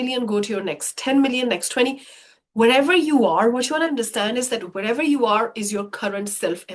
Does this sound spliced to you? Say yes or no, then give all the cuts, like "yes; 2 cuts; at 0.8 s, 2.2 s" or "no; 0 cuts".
no; 0 cuts